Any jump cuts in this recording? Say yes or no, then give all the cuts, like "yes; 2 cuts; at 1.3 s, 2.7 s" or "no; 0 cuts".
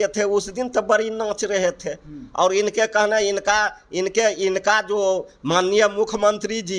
no; 0 cuts